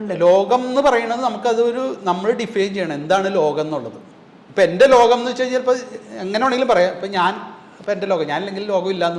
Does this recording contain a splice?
no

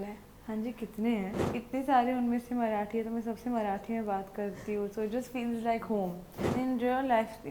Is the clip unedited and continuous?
no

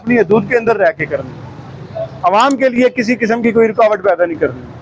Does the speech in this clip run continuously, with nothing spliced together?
yes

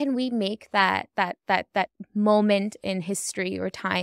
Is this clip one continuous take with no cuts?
yes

